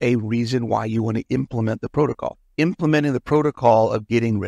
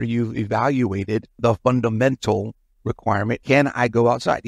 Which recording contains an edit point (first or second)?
second